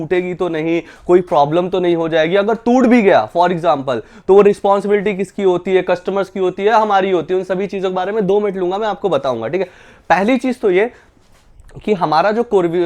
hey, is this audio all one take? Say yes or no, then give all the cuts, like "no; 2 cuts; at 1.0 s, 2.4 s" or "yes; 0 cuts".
yes; 0 cuts